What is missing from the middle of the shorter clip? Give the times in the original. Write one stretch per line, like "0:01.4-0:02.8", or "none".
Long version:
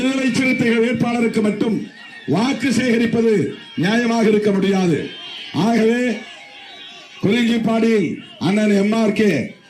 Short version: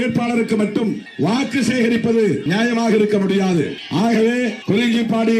0:01.9-0:02.1
0:03.5-0:03.8
0:05.1-0:05.4
0:06.2-0:07.1